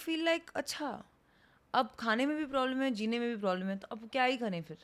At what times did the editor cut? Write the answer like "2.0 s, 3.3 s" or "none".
none